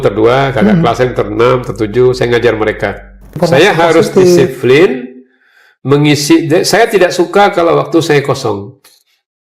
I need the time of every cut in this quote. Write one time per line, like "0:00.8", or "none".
0:03.4